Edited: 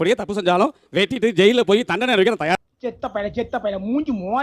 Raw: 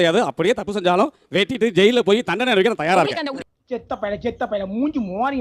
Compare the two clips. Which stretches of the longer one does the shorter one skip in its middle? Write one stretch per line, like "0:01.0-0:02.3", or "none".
0:02.9-0:03.4